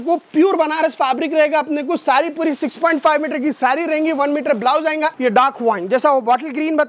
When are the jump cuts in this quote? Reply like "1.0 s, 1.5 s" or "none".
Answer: 5.1 s